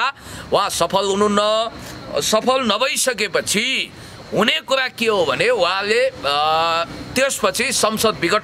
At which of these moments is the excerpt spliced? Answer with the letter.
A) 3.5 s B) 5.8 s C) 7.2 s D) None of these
D